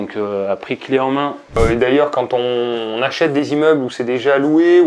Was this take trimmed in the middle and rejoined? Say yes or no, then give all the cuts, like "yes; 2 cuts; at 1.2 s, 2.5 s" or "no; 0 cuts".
yes; 1 cut; at 1.6 s